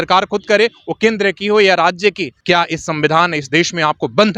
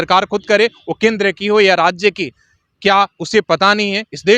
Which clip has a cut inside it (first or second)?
first